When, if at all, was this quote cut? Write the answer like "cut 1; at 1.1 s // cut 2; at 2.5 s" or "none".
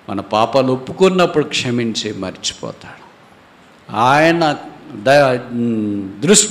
none